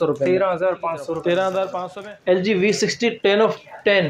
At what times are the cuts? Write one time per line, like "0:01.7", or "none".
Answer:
0:01.8